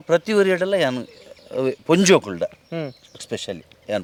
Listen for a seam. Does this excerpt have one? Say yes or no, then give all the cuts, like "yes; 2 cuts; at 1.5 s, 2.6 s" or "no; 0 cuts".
no; 0 cuts